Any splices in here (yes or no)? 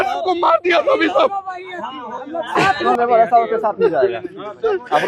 yes